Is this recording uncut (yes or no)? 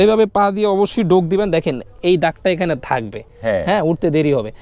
yes